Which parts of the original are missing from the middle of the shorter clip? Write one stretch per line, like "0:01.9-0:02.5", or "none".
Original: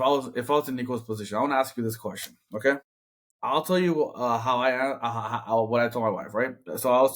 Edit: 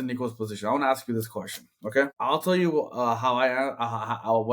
0:02.8-0:03.4